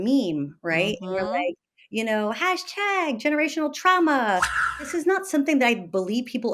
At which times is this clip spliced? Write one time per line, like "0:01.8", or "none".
0:04.8